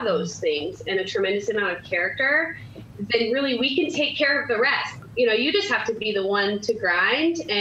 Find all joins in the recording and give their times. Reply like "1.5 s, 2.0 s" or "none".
4.9 s